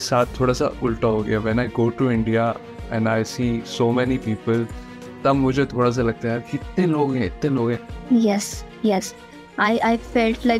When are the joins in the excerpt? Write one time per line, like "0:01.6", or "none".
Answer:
0:07.9